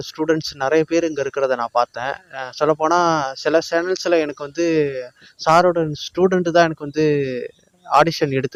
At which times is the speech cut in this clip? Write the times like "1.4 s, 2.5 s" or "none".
none